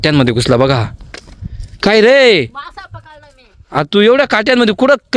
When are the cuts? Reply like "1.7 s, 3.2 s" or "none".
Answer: none